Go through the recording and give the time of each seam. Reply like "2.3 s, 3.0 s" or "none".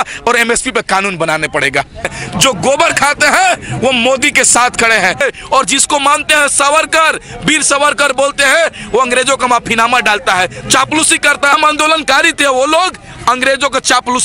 2.2 s, 5.2 s, 11.5 s